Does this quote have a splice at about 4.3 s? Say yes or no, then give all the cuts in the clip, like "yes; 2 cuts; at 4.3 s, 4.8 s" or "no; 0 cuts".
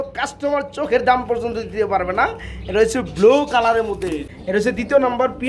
yes; 1 cut; at 4.3 s